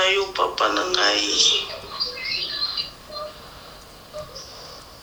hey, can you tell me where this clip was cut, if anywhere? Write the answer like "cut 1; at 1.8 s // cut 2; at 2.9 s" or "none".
none